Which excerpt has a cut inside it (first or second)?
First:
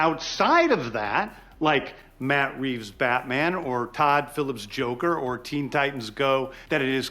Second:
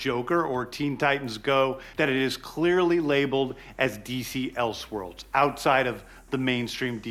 first